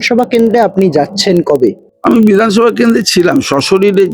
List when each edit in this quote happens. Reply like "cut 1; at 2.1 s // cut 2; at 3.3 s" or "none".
cut 1; at 1.9 s